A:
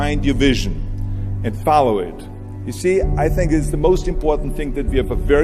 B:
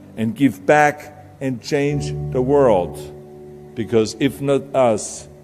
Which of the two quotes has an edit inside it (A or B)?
B